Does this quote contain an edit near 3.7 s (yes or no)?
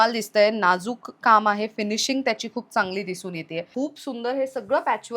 yes